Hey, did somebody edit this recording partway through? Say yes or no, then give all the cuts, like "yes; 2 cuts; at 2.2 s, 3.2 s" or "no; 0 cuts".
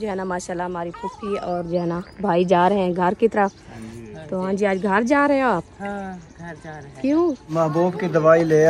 yes; 1 cut; at 7.4 s